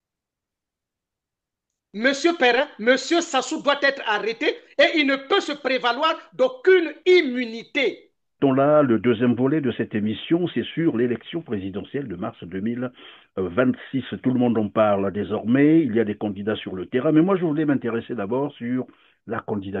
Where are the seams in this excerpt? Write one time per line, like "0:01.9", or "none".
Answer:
0:08.4

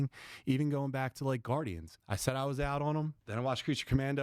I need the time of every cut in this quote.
0:02.0
0:03.2

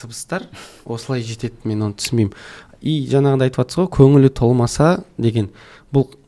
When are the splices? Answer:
none

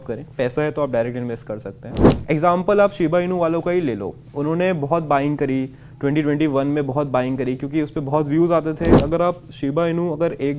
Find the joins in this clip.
0:02.1
0:09.0

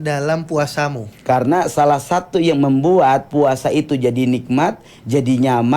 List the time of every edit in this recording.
0:01.1

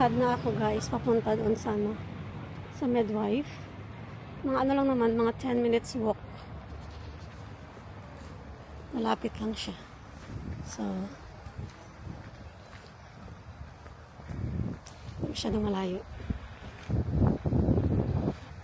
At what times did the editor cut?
none

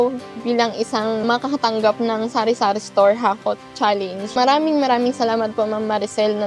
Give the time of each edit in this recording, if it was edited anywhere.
0:01.2
0:04.3

